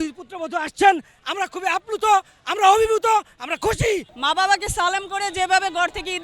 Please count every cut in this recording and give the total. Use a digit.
1